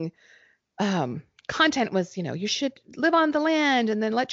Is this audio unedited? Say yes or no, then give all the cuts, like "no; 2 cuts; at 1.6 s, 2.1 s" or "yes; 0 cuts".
yes; 0 cuts